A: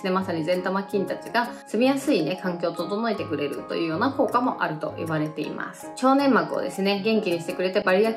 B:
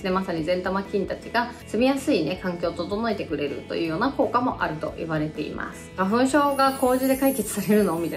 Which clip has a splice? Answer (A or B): B